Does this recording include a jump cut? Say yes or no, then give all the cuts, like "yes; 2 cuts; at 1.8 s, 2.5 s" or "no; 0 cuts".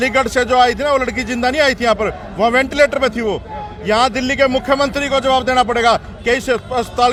no; 0 cuts